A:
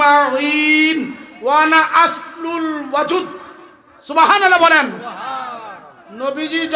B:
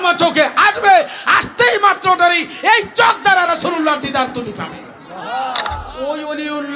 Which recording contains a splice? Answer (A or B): B